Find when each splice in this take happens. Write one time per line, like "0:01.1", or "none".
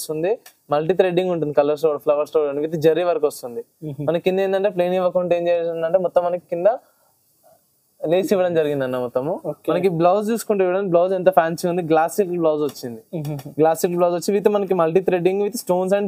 none